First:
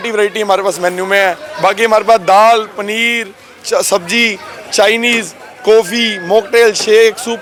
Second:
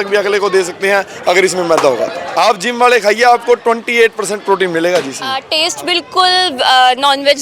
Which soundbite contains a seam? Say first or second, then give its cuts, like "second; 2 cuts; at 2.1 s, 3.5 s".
second; 2 cuts; at 2.2 s, 5.3 s